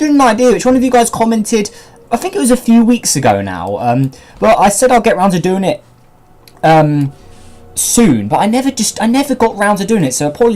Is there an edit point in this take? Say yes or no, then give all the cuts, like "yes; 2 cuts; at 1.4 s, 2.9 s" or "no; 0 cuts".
yes; 1 cut; at 6.6 s